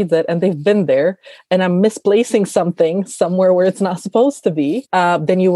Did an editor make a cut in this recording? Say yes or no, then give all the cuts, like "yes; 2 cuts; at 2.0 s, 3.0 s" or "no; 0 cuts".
no; 0 cuts